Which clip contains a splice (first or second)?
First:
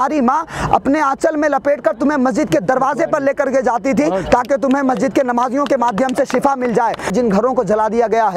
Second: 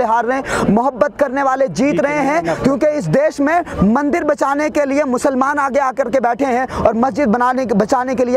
first